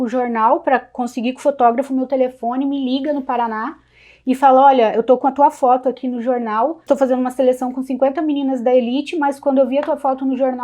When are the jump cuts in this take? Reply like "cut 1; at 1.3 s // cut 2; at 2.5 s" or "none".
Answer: cut 1; at 6.8 s